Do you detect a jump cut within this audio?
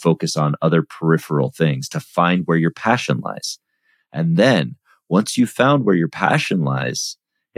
no; 0 cuts

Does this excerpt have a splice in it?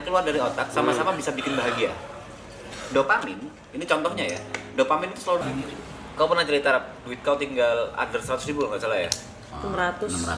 yes; 1 cut; at 5.4 s

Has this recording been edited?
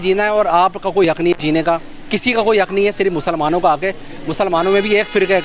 no; 0 cuts

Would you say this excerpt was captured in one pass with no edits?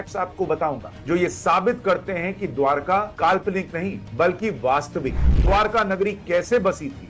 yes; 0 cuts

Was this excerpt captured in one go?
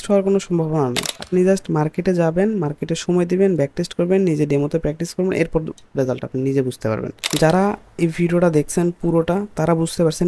no; 2 cuts; at 1.1 s, 7.2 s

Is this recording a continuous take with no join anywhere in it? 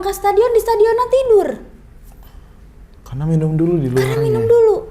yes; 0 cuts

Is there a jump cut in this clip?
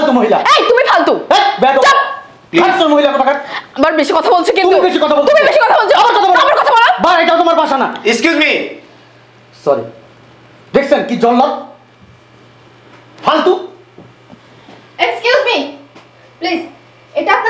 no; 0 cuts

